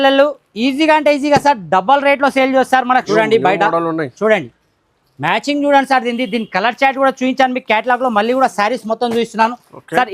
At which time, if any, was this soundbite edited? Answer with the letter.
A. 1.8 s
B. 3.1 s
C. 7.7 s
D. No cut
B